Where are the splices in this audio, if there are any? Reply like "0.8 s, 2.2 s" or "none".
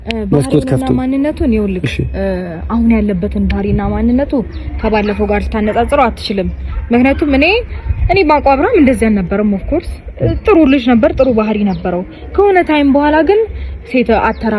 none

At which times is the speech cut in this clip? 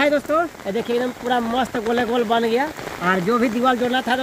2.8 s

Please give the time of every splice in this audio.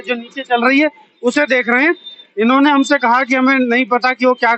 none

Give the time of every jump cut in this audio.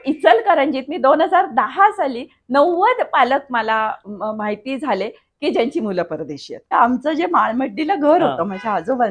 6.7 s

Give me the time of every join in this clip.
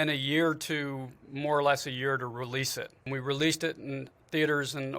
3.1 s

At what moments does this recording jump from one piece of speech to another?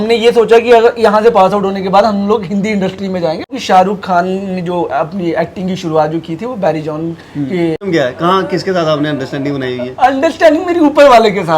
3.5 s, 7.8 s

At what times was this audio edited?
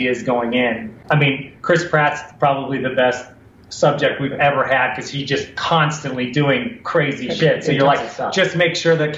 1.0 s

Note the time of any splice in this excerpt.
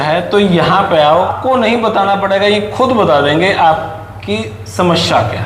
1.3 s

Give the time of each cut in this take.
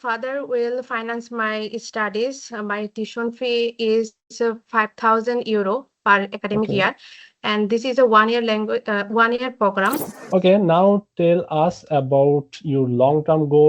10.1 s

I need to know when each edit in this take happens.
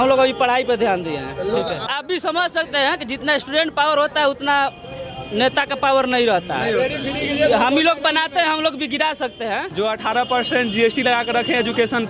1.9 s, 9.7 s

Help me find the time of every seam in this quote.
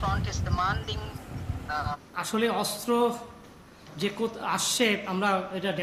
1.9 s

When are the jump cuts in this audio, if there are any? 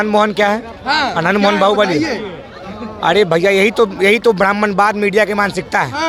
none

